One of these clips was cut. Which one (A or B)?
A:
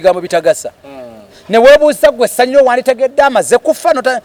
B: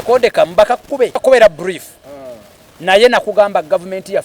B